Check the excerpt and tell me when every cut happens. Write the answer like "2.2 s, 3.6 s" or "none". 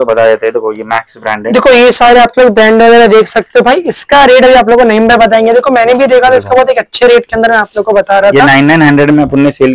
none